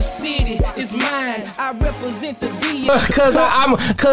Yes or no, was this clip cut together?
yes